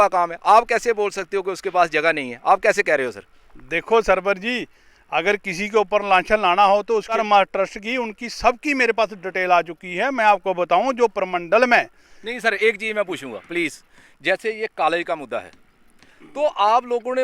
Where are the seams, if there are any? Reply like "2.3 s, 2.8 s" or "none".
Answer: 7.2 s